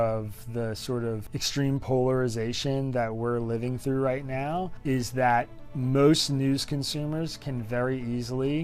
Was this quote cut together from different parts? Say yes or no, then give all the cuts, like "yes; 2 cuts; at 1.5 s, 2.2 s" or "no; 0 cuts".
yes; 2 cuts; at 1.3 s, 4.7 s